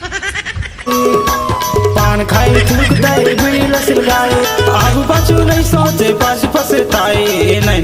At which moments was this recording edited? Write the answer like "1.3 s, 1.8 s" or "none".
none